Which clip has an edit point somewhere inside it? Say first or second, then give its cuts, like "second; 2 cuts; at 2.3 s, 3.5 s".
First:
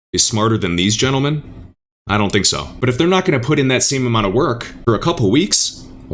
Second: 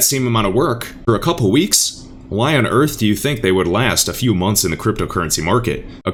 first; 1 cut; at 2.7 s